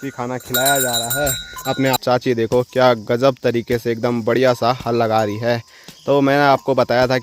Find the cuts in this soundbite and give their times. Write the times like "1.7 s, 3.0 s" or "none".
2.0 s